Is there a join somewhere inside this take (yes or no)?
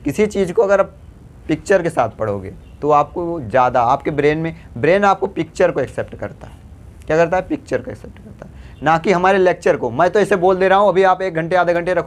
no